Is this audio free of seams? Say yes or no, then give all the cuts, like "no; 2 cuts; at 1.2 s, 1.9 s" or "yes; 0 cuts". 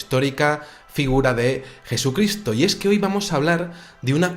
no; 1 cut; at 1.2 s